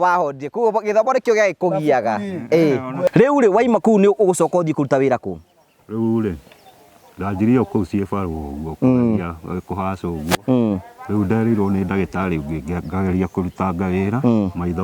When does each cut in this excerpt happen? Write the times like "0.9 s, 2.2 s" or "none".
3.1 s